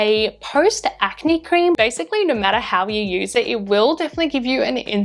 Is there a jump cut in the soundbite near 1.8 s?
yes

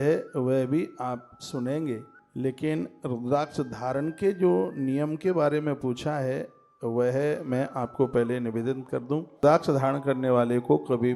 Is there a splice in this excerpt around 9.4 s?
yes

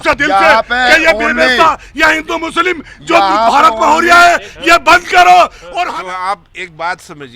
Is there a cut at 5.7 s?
yes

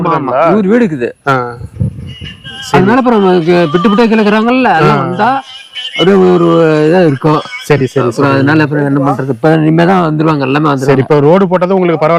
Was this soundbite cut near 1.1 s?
no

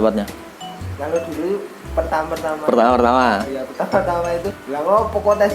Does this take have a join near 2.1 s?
no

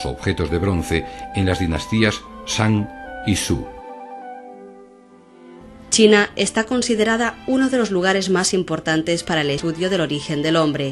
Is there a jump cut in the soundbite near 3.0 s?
yes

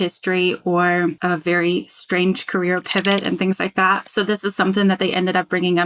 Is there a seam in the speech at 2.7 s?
no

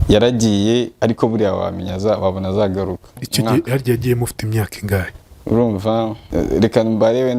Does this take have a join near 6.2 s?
yes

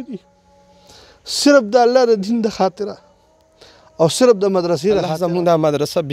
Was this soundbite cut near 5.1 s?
yes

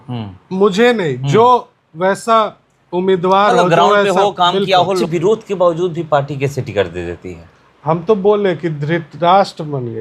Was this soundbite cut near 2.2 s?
no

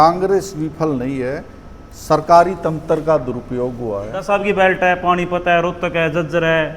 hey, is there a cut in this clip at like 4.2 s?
yes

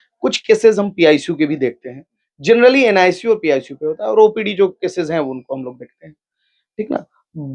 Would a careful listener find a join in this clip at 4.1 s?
no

